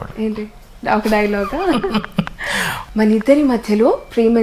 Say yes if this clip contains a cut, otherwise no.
yes